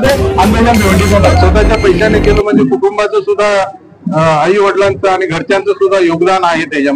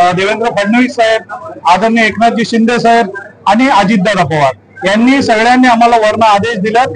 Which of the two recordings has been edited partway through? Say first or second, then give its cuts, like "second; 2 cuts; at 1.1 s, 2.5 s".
first; 1 cut; at 1.3 s